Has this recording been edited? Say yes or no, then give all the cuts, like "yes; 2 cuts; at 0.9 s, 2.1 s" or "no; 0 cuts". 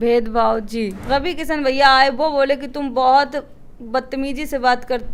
yes; 1 cut; at 1.0 s